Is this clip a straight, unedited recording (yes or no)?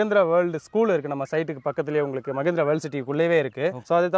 yes